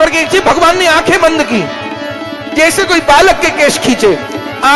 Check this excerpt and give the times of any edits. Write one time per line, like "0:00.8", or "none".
none